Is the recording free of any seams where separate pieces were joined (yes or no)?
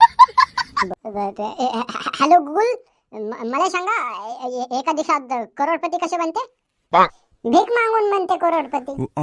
no